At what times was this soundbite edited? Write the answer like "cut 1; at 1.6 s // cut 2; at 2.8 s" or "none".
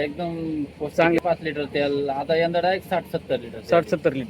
cut 1; at 1.2 s